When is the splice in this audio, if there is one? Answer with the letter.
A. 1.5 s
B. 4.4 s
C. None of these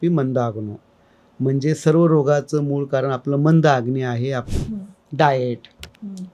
B